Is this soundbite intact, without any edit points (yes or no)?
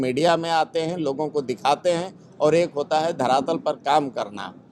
yes